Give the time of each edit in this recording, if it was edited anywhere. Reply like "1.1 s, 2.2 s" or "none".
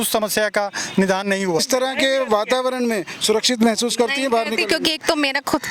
1.6 s